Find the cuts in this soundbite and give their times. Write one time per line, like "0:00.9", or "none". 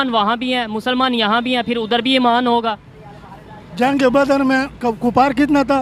none